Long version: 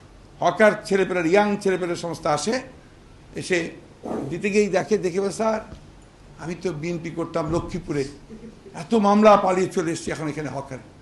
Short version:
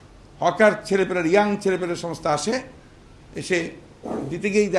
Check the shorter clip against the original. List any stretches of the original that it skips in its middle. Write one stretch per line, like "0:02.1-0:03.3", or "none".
none